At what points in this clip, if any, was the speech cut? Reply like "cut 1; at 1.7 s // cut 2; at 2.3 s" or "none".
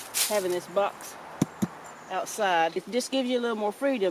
cut 1; at 2.8 s